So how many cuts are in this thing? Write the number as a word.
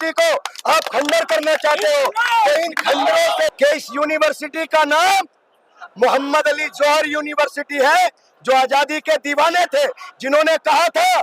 one